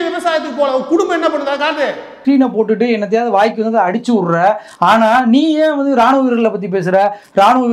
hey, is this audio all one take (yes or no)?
no